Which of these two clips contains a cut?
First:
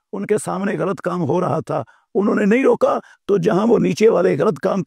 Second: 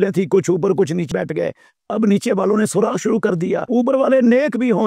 second; 2 cuts; at 1.1 s, 3.6 s

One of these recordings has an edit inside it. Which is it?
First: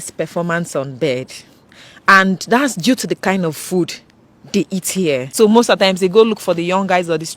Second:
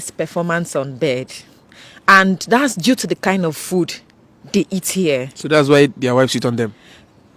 first; 1 cut; at 5.3 s

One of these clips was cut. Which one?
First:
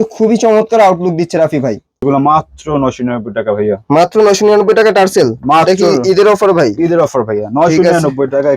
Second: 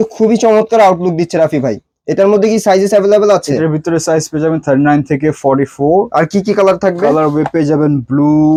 first; 1 cut; at 2.0 s

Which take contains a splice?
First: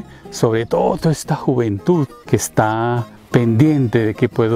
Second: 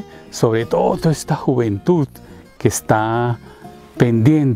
first; 2 cuts; at 2.2 s, 3.1 s

